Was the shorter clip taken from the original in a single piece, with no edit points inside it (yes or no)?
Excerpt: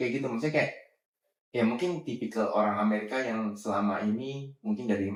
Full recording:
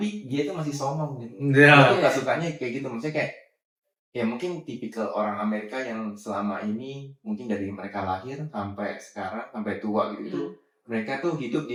yes